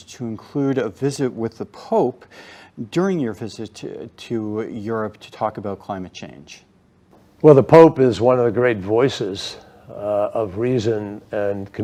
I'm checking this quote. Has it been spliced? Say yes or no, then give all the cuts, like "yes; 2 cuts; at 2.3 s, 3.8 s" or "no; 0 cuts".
no; 0 cuts